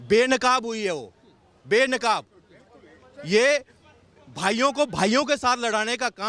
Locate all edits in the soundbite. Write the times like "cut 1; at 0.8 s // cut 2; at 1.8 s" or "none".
none